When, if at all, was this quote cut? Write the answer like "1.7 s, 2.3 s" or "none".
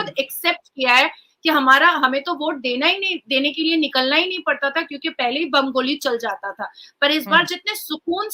none